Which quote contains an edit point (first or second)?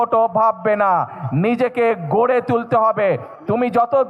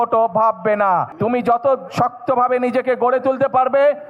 second